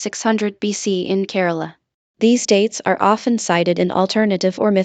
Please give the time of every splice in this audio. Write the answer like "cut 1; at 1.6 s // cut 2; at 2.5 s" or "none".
none